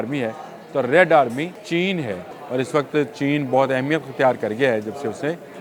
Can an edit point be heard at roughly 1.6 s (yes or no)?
yes